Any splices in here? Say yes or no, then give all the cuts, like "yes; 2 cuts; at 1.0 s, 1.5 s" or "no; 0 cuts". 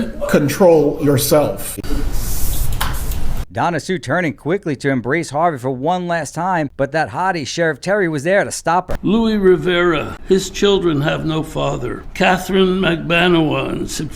yes; 5 cuts; at 1.9 s, 6.7 s, 8.9 s, 10.1 s, 12.0 s